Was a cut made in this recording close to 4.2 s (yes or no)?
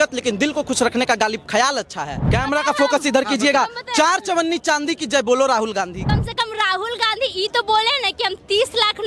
no